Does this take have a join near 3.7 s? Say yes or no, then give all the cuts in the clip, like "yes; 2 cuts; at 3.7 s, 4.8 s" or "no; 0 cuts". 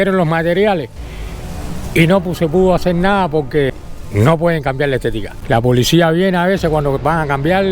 yes; 2 cuts; at 3.7 s, 5.3 s